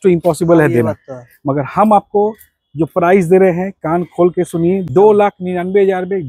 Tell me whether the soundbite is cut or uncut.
cut